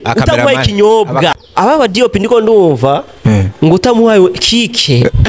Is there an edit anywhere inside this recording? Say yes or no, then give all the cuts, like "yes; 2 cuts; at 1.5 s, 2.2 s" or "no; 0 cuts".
yes; 1 cut; at 1.3 s